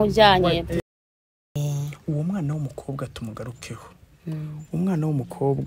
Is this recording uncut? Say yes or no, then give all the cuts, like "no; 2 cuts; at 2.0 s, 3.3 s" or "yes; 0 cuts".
no; 1 cut; at 0.9 s